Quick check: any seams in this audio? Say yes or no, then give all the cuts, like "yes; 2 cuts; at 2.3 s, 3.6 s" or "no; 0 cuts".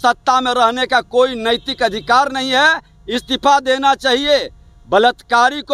no; 0 cuts